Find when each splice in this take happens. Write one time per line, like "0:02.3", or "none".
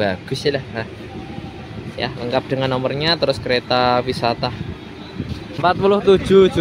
0:05.6